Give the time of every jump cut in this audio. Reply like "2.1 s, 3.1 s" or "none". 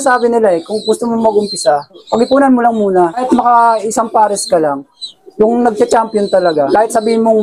2.0 s, 3.2 s, 5.0 s, 5.8 s, 6.7 s

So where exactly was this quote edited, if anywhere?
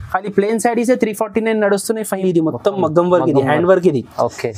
2.2 s

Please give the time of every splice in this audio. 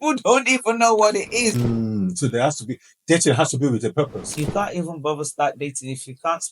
1.6 s, 4.3 s

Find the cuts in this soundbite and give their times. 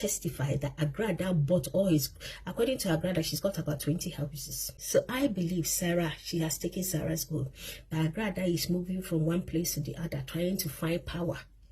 4.8 s

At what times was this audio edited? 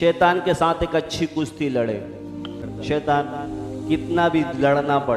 2.7 s

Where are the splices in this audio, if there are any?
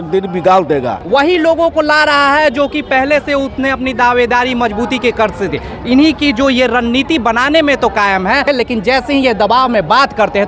1.0 s, 8.5 s

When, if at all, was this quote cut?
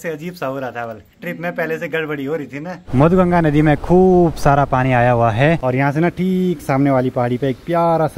2.7 s, 5.6 s

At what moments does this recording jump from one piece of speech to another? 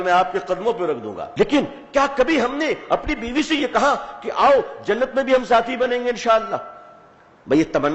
1.2 s

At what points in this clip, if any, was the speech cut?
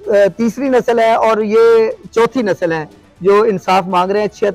none

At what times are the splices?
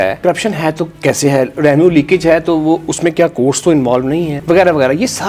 none

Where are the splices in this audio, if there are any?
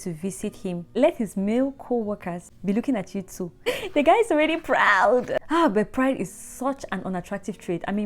0.9 s, 2.4 s, 3.7 s, 5.4 s

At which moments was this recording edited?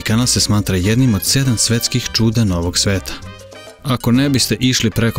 3.8 s

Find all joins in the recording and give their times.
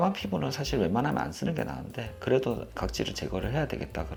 none

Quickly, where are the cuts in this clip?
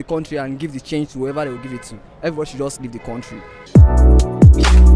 none

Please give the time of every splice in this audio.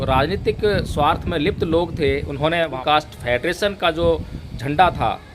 2.8 s

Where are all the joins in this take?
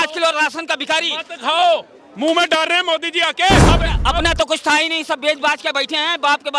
3.6 s

